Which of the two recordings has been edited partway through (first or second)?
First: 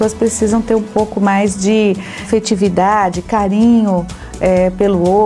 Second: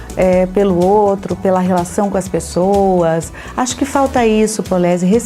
first